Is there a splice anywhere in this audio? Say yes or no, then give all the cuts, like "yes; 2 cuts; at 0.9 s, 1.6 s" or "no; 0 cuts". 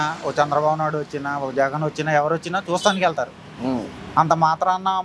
no; 0 cuts